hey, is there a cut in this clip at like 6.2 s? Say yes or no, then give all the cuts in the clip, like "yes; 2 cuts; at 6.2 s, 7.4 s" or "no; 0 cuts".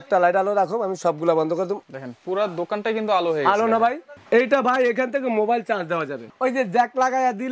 yes; 3 cuts; at 1.8 s, 4.1 s, 6.2 s